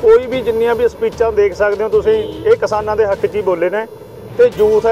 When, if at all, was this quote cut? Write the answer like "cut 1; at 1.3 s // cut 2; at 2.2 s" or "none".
none